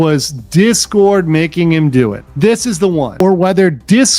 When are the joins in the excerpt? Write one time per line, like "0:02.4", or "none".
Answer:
0:03.2